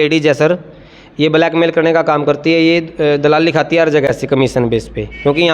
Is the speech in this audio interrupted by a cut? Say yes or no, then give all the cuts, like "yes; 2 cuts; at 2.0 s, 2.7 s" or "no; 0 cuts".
no; 0 cuts